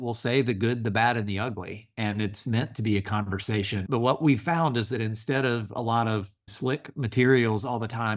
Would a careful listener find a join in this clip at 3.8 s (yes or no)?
yes